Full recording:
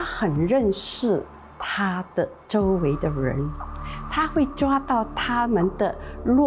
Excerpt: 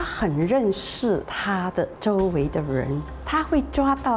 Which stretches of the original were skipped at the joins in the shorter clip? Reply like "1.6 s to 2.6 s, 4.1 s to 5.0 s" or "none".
1.8 s to 2.3 s, 3.6 s to 4.0 s